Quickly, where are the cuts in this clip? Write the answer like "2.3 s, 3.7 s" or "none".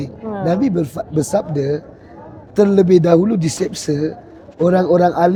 none